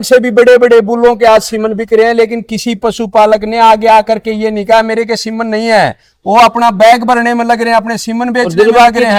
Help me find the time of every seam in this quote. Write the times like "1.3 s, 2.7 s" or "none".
none